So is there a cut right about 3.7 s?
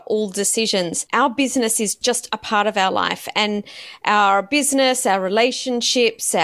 no; 2 cuts; at 1.0 s, 2.0 s

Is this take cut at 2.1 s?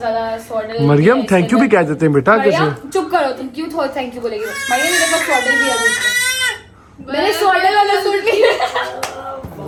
no; 0 cuts

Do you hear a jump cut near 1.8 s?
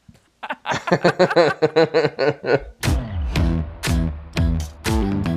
no; 1 cut; at 3.0 s

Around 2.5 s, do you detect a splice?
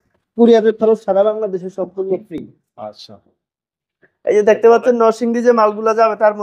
no; 0 cuts

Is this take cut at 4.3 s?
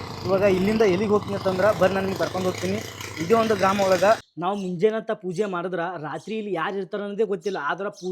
yes; 1 cut; at 4.3 s

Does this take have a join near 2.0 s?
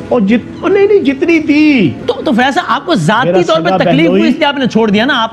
yes; 1 cut; at 2.0 s

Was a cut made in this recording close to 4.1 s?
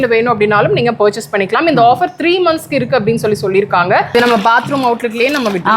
yes; 1 cut; at 4.1 s

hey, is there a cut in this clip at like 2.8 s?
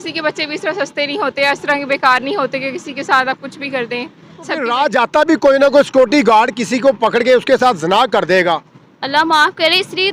no; 1 cut; at 4.7 s

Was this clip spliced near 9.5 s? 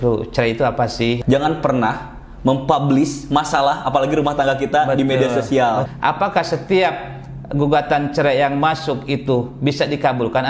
no; 2 cuts; at 1.2 s, 5.9 s

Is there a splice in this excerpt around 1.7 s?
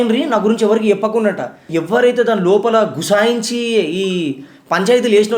yes; 1 cut; at 1.7 s

